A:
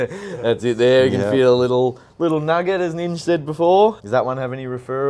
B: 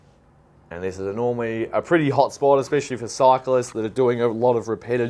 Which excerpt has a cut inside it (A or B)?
A